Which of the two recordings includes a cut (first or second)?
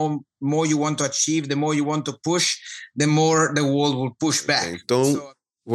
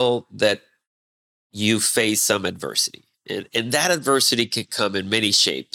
first